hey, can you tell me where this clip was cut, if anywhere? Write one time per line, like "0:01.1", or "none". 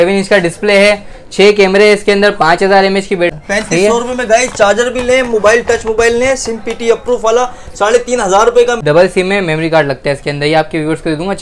0:03.4
0:08.8